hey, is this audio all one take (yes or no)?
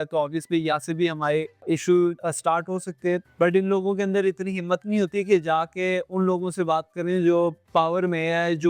no